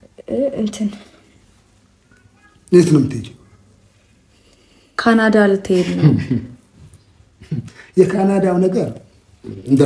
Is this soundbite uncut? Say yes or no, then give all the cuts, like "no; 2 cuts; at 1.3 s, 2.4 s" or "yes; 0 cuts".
yes; 0 cuts